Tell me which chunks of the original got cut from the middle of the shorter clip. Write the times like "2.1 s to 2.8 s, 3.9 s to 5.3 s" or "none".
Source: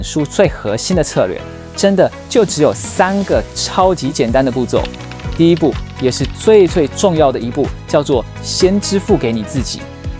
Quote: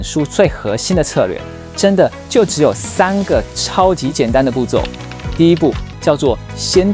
5.9 s to 7.8 s